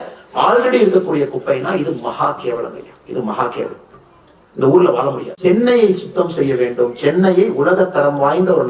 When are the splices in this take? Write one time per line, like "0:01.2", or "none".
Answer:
0:05.2

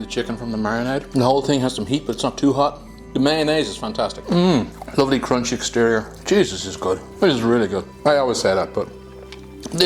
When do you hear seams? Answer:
0:01.1
0:04.2
0:04.8
0:06.1
0:07.1
0:07.9

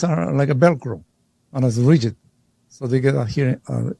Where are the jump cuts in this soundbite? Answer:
none

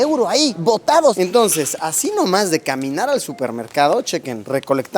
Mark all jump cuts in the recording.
0:01.1

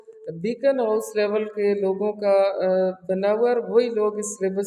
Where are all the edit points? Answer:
none

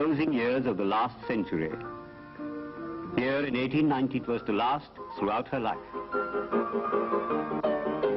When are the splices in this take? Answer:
none

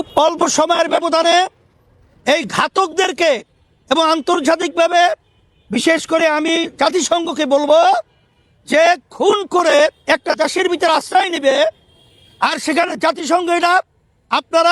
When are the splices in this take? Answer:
none

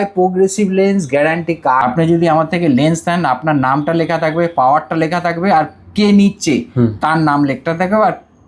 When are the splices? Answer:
0:01.8

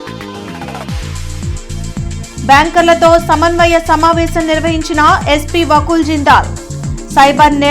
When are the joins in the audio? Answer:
0:01.8

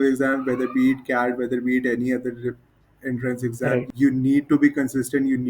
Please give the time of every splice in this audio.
0:03.9

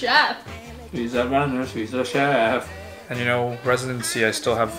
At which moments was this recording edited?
0:03.0

